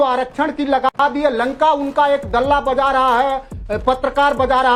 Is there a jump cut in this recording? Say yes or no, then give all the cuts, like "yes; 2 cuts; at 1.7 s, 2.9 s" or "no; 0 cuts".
no; 0 cuts